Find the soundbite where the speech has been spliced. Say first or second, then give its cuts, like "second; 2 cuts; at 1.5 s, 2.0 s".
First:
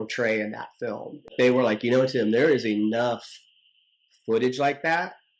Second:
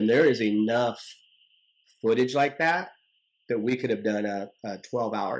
first; 1 cut; at 1.3 s